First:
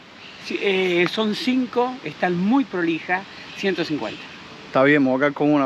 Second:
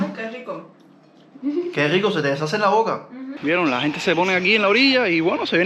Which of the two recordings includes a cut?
second; 1 cut; at 3.3 s

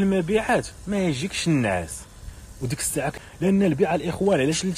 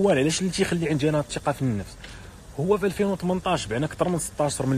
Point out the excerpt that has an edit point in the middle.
first; 1 cut; at 3.2 s

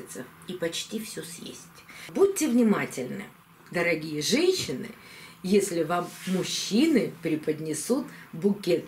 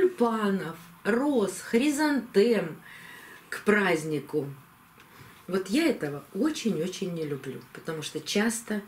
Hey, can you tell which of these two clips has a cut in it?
first; 1 cut; at 2.1 s

